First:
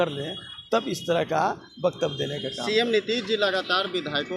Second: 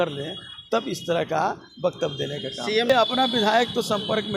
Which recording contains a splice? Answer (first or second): second